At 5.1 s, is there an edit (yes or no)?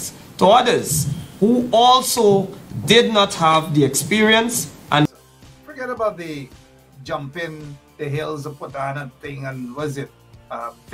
yes